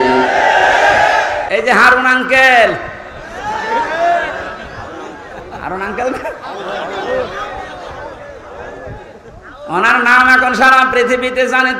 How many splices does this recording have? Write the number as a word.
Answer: one